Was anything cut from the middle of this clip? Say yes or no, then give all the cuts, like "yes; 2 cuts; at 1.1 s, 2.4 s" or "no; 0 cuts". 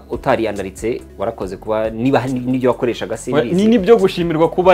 no; 0 cuts